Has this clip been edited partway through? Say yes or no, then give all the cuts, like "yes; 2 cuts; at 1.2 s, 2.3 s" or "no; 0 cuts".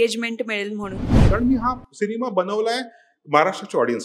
yes; 1 cut; at 1.3 s